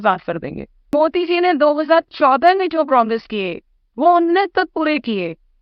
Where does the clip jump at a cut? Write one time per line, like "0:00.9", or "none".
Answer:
0:00.9